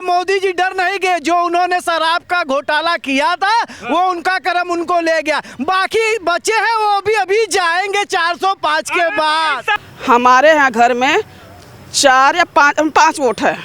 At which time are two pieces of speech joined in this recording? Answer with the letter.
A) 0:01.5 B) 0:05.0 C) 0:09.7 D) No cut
C